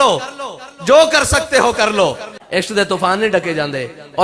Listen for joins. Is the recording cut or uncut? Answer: cut